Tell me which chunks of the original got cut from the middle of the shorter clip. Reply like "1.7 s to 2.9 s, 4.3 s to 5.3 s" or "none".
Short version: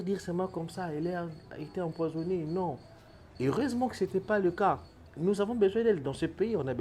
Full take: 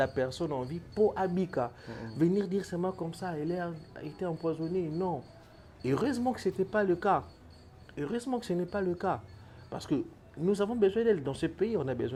7.5 s to 10.2 s